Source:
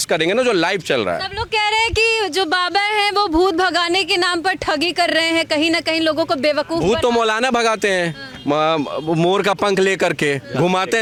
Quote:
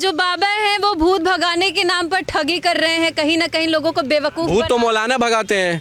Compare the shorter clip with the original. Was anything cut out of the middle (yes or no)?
no